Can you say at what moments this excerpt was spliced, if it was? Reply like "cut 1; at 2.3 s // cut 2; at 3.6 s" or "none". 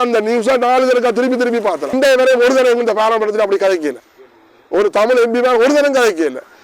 cut 1; at 1.9 s